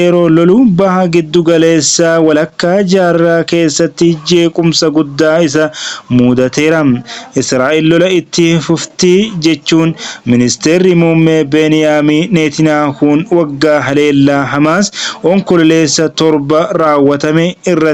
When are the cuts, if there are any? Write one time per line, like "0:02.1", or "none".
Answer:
none